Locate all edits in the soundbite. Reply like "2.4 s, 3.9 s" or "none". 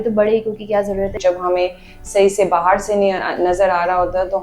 1.2 s